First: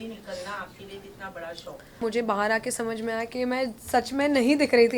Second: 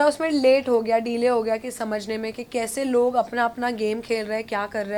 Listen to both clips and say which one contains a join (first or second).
first